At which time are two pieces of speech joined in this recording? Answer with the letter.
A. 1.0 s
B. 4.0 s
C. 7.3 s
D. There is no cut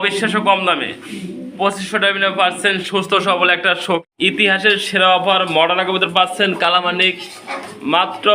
B